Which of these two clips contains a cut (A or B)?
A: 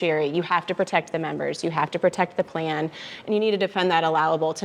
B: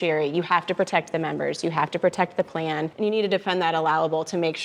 B